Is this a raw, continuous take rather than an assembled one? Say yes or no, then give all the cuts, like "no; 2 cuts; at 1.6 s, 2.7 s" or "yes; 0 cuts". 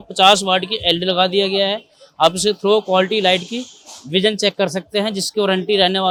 yes; 0 cuts